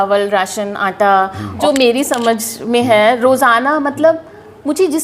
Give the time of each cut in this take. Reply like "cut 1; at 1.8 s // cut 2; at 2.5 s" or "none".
cut 1; at 1.5 s